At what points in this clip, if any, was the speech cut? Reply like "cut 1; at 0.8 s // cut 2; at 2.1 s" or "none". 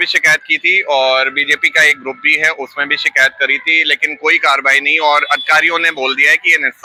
none